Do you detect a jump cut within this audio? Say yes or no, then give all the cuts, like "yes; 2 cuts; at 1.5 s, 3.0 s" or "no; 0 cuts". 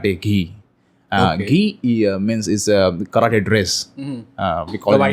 no; 0 cuts